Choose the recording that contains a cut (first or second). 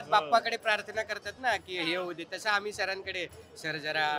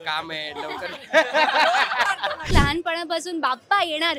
second